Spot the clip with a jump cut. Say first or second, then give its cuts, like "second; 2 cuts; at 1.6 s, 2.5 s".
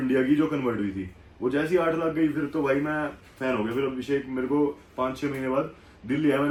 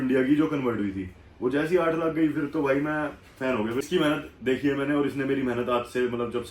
second; 1 cut; at 3.8 s